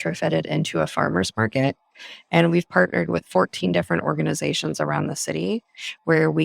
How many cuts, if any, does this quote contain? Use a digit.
0